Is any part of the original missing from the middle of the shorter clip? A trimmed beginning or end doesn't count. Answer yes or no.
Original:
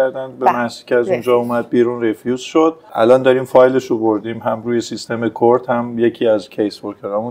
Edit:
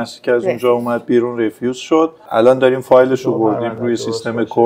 yes